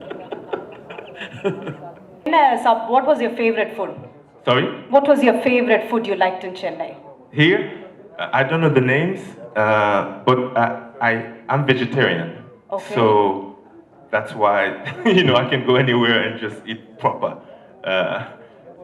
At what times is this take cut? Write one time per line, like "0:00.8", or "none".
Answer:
0:02.3